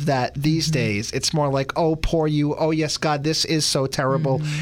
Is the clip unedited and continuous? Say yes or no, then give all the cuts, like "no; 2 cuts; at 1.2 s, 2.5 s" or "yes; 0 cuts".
yes; 0 cuts